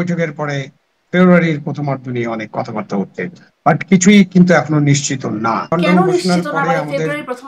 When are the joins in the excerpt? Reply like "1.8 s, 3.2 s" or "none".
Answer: 5.7 s